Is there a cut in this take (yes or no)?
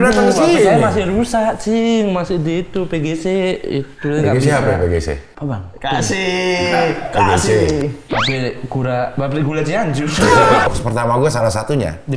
yes